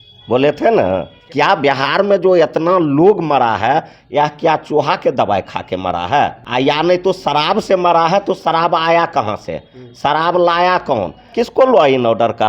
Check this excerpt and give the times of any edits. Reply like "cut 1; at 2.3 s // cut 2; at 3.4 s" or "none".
cut 1; at 1.2 s // cut 2; at 6.4 s // cut 3; at 11.4 s